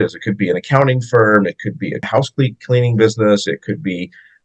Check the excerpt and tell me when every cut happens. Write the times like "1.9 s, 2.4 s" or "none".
2.0 s